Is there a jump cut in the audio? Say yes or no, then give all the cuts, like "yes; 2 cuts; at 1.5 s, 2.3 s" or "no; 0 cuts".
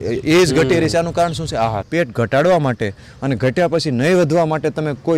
yes; 1 cut; at 1.9 s